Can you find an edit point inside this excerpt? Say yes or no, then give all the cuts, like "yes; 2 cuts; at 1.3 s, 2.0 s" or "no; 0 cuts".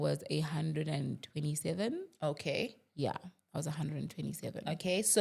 no; 0 cuts